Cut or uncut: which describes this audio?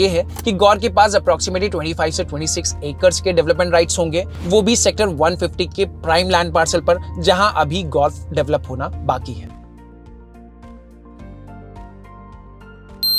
uncut